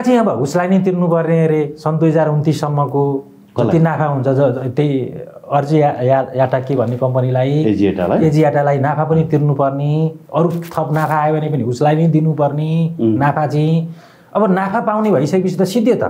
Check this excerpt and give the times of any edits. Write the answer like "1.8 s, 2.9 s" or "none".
none